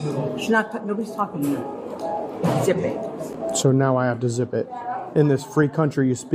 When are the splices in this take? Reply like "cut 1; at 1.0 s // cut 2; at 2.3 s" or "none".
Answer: none